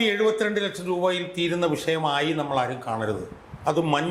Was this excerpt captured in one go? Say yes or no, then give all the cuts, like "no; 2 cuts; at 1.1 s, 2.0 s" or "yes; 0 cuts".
yes; 0 cuts